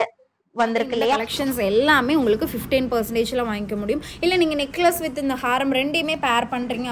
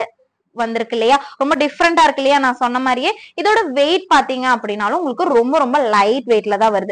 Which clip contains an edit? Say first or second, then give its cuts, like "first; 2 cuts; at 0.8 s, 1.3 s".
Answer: first; 1 cut; at 1.2 s